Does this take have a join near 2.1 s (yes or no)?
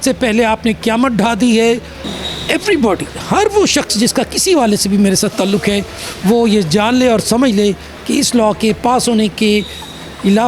no